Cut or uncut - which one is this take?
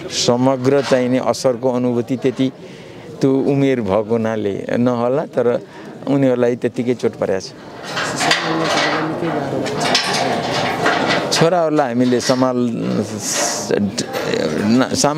uncut